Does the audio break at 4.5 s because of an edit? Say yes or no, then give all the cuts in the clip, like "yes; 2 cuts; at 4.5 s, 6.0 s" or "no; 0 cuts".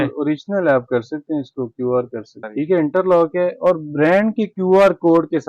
no; 1 cut; at 2.4 s